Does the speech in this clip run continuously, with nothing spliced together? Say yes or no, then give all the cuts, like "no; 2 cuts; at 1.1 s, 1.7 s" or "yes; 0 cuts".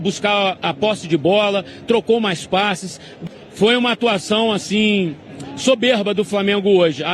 no; 1 cut; at 3.2 s